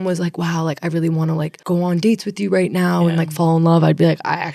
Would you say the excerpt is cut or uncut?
uncut